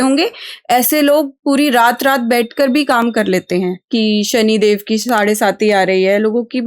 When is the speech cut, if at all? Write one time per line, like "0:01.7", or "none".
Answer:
0:03.8